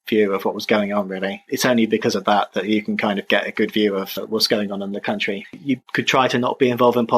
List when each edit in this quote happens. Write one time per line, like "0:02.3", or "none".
0:01.5
0:05.6